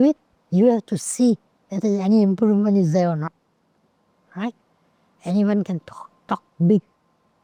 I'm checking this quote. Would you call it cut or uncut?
uncut